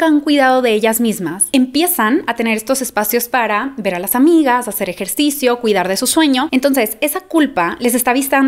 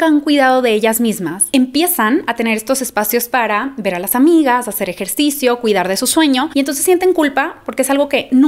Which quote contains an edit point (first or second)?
first